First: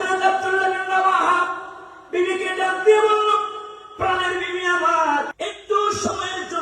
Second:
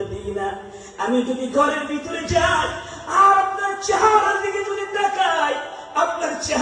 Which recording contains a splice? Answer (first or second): first